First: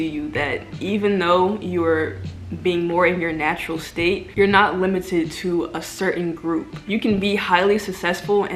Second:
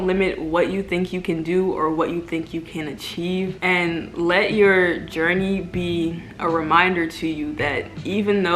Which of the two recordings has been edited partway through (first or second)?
second